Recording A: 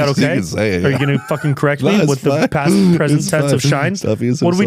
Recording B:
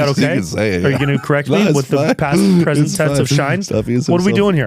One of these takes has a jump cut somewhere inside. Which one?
B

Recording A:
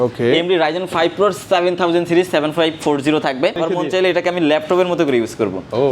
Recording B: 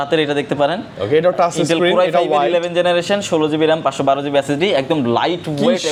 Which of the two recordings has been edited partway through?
A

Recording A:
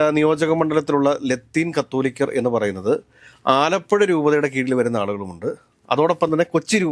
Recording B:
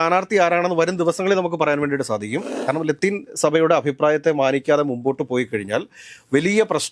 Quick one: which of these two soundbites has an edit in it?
B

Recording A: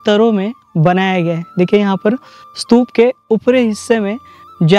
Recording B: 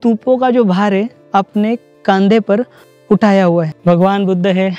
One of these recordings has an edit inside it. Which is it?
B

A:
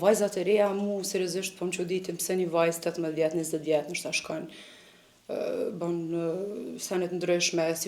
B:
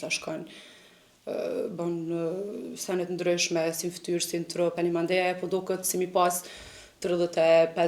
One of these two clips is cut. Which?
B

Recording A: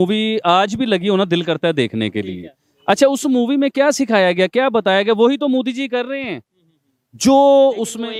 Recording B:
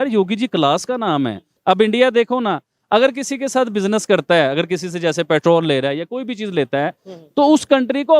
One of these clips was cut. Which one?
B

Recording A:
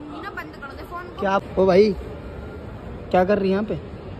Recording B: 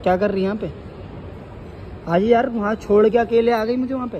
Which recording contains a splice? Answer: A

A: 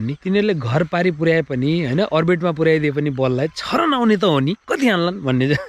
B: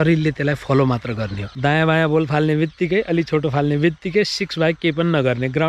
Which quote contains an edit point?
B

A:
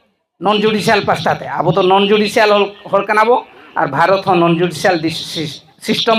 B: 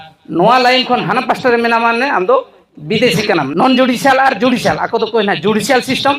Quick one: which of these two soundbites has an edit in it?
B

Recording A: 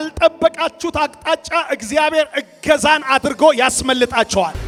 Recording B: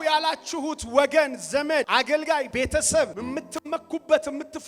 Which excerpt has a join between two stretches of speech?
B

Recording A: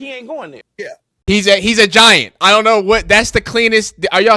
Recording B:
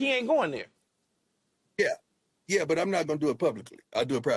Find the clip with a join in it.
A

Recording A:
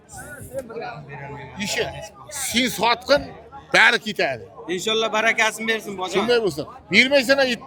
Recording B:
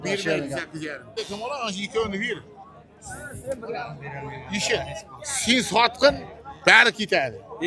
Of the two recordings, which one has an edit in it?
B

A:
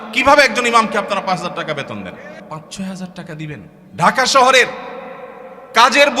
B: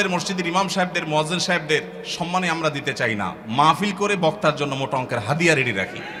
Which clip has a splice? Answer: A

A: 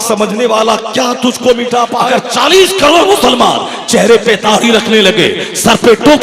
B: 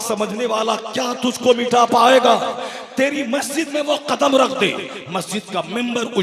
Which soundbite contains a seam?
A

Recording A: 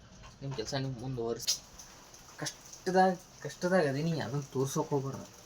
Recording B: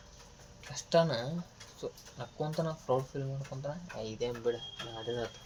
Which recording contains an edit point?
A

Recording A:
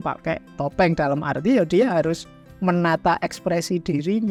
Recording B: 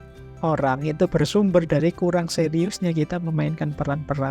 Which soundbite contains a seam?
B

